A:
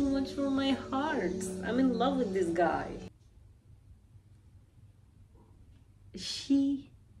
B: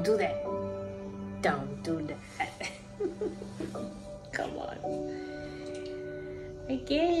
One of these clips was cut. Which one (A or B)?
A